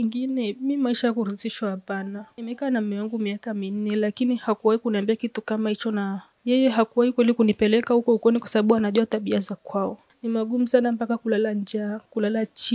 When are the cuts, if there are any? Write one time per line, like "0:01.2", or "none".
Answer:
0:02.3
0:10.0